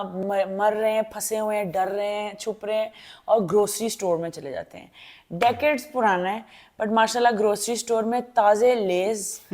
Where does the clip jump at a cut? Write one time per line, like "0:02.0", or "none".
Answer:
none